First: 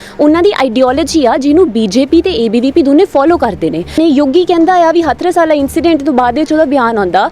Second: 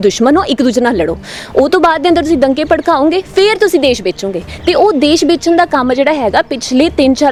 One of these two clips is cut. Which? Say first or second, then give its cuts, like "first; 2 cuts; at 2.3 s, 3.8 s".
first; 1 cut; at 4.0 s